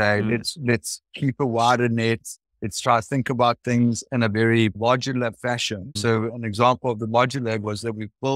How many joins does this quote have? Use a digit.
2